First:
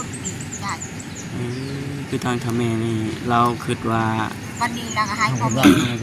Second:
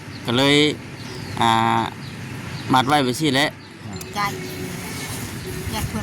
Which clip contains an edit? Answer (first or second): second